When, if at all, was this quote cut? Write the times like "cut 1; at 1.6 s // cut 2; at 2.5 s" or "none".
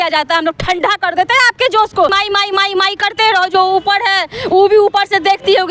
cut 1; at 2.1 s

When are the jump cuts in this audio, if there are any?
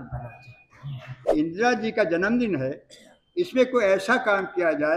cut 1; at 1.1 s

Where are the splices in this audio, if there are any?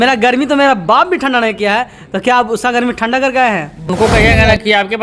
cut 1; at 3.9 s

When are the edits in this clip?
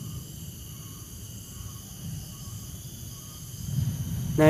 none

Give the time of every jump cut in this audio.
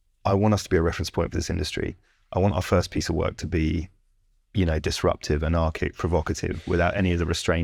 none

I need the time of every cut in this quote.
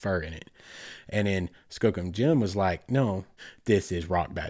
cut 1; at 3.3 s

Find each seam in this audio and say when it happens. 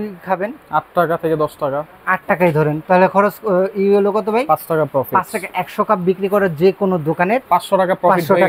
cut 1; at 7.4 s

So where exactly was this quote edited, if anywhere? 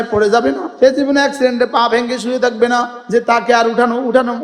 cut 1; at 3.0 s

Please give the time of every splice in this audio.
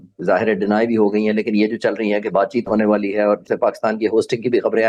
cut 1; at 3.4 s

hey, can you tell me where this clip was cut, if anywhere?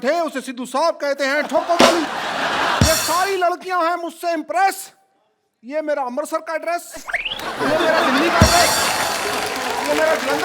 cut 1; at 2.8 s

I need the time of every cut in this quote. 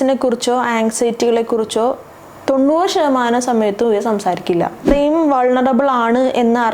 cut 1; at 4.9 s

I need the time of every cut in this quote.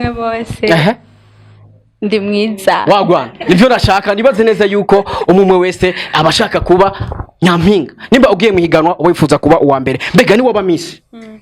none

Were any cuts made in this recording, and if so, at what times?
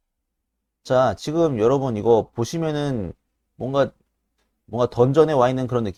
none

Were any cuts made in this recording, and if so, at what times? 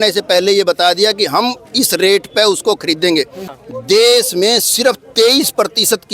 cut 1; at 3.6 s

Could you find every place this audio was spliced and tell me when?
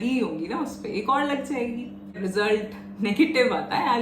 cut 1; at 2.2 s

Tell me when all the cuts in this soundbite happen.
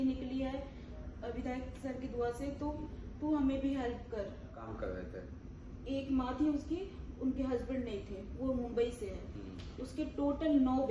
cut 1; at 4.6 s

